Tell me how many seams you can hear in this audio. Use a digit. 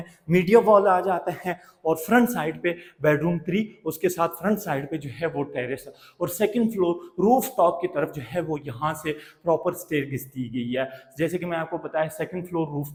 0